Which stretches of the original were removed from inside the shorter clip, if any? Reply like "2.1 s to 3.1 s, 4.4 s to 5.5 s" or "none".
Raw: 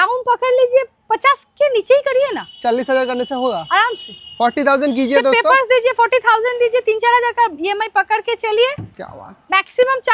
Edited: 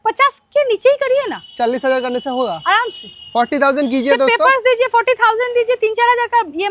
none